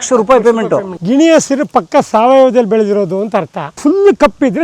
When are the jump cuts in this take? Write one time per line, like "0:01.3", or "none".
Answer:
0:00.9
0:03.7

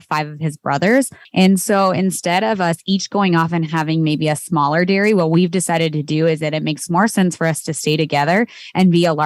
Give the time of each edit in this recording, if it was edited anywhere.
0:01.2

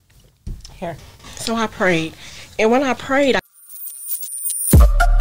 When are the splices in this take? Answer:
0:03.4

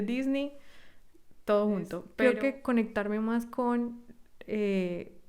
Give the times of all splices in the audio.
0:02.0

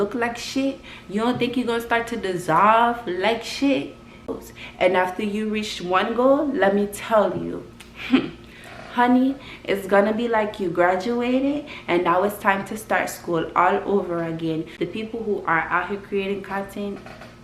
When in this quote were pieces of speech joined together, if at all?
0:04.3
0:14.7

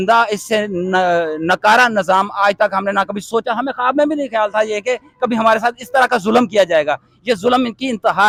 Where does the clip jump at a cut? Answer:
none

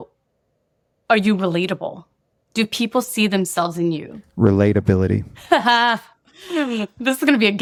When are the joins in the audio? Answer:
none

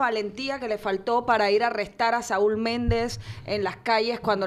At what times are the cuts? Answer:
none

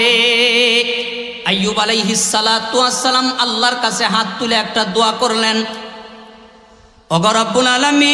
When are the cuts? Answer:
0:01.3

